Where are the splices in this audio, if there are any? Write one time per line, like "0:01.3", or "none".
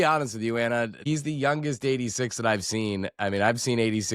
0:01.1